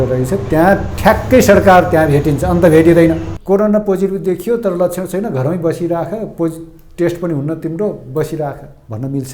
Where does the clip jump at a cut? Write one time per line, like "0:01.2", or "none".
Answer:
0:03.3